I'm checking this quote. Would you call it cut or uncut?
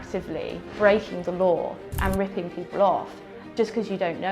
cut